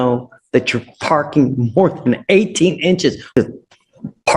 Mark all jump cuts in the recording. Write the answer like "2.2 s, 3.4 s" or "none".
3.2 s